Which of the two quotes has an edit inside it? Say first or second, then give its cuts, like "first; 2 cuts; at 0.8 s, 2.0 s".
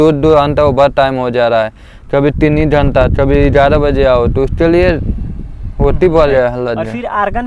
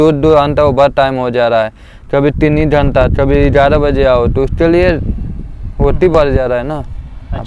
first; 1 cut; at 6.2 s